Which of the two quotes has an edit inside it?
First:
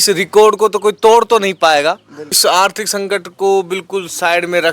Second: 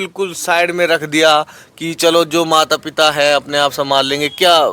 first; 1 cut; at 2.3 s

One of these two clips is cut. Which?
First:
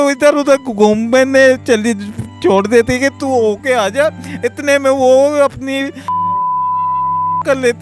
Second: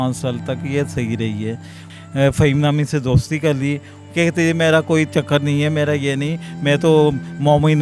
second; 2 cuts; at 1.8 s, 4.0 s

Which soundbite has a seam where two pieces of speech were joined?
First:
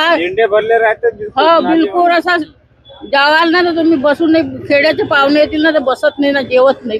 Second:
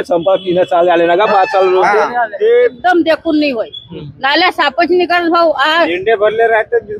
second; 1 cut; at 2.8 s

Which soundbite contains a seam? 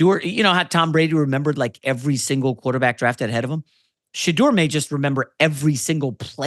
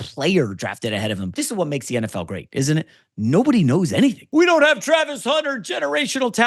second; 2 cuts; at 1.3 s, 4.2 s

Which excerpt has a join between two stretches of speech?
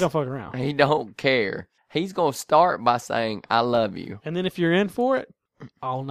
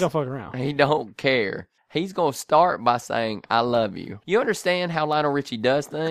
second; 1 cut; at 4.1 s

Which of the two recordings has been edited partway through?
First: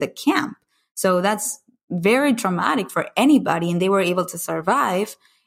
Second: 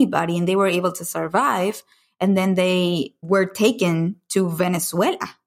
second; 1 cut; at 3.2 s

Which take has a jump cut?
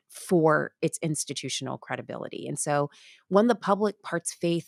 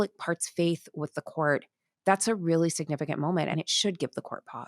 second; 1 cut; at 3.5 s

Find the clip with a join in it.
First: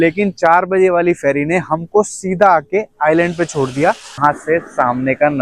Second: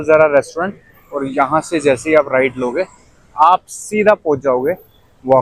first; 1 cut; at 4.2 s

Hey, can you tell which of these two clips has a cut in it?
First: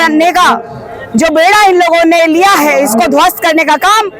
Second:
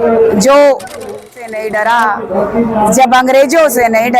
second; 1 cut; at 1.2 s

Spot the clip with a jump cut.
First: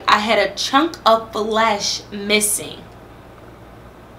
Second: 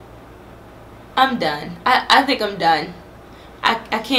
second; 1 cut; at 1.1 s

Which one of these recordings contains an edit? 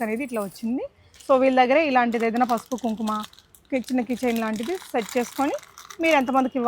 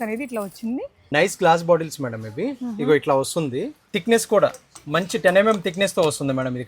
second; 2 cuts; at 0.9 s, 3.8 s

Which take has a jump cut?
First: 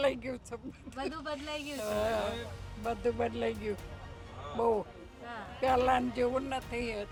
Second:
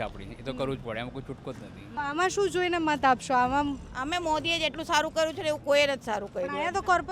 second; 1 cut; at 1.8 s

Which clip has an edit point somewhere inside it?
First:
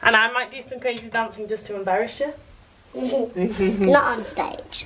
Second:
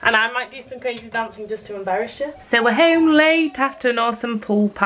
second; 1 cut; at 2.4 s

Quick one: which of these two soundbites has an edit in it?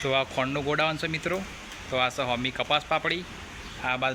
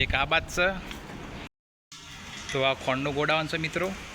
second; 1 cut; at 1.5 s

